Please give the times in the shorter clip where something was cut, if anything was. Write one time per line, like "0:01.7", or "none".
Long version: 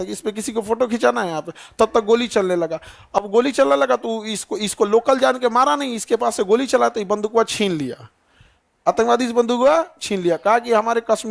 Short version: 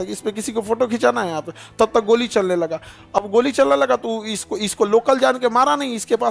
none